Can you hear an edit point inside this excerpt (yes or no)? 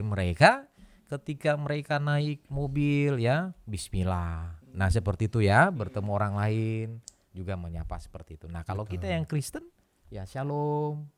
no